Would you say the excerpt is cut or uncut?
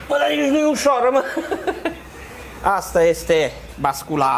uncut